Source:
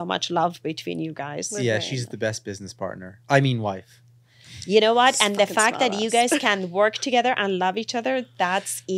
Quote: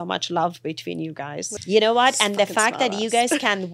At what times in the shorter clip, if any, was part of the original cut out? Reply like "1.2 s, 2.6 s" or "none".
1.4 s